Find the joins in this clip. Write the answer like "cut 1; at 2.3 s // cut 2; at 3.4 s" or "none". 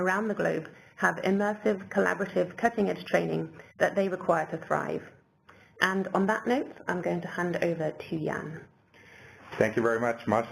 cut 1; at 8.1 s